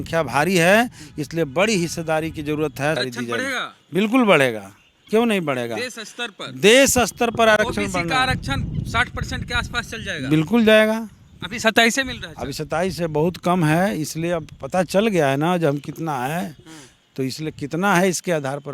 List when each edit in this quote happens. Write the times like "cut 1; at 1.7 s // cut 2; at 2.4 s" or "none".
cut 1; at 3.0 s

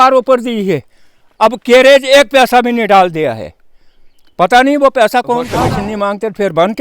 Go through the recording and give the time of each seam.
cut 1; at 5.5 s

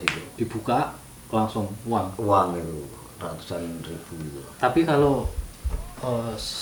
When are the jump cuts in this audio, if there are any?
none

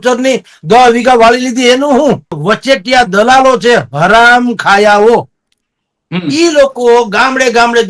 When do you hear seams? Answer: cut 1; at 2.4 s

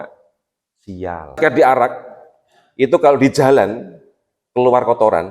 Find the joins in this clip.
cut 1; at 1.4 s

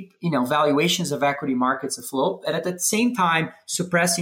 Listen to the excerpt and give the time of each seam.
none

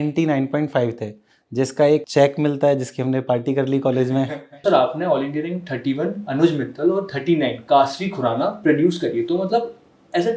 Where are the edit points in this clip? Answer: cut 1; at 2.1 s // cut 2; at 4.6 s

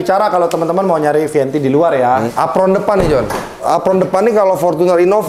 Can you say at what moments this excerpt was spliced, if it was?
cut 1; at 2.3 s // cut 2; at 3.6 s

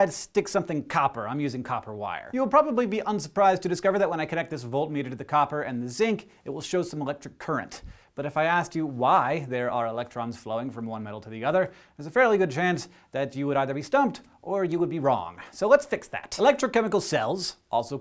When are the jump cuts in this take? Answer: cut 1; at 1.8 s

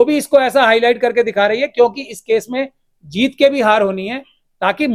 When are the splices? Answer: none

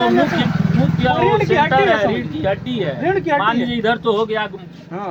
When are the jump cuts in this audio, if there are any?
none

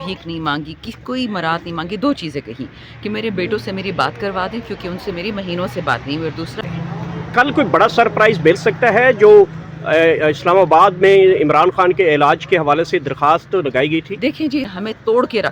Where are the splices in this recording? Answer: cut 1; at 6.6 s // cut 2; at 14.7 s

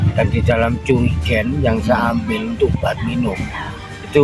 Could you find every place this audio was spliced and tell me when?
none

